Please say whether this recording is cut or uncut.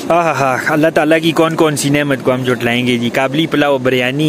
uncut